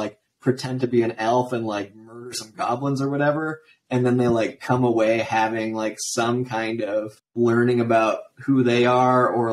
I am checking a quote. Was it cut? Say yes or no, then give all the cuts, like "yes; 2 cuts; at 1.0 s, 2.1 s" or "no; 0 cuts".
no; 0 cuts